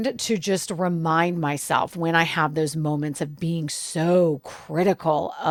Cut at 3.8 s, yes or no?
no